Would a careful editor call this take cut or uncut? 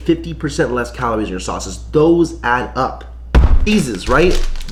uncut